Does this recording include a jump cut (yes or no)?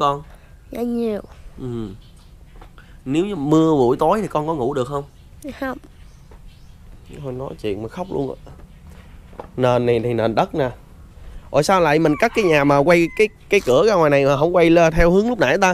no